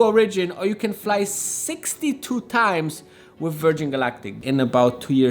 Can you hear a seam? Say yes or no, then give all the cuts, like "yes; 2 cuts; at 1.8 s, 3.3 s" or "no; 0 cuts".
yes; 1 cut; at 4.4 s